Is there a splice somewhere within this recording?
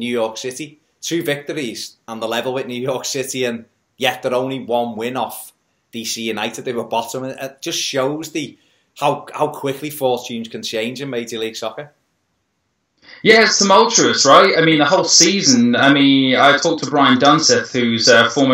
no; 0 cuts

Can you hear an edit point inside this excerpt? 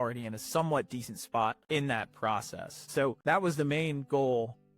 yes; 2 cuts; at 1.6 s, 3.2 s

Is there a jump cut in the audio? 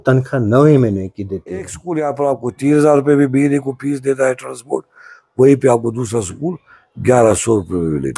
yes; 1 cut; at 1.8 s

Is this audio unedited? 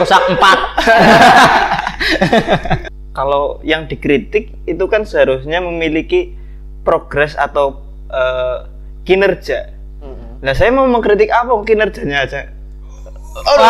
no; 1 cut; at 2.9 s

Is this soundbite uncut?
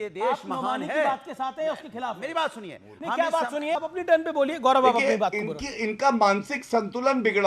no; 1 cut; at 3.8 s

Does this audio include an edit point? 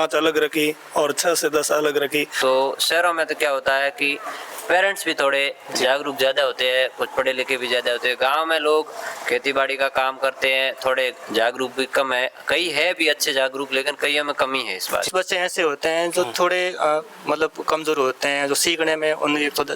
yes; 2 cuts; at 2.3 s, 15.1 s

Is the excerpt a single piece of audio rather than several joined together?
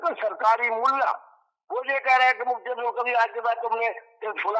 yes; 0 cuts

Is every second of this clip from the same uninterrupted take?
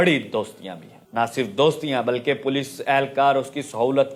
yes; 0 cuts

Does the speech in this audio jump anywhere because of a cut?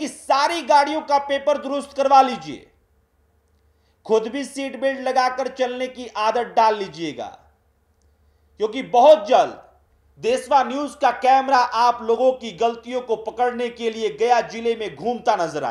no; 0 cuts

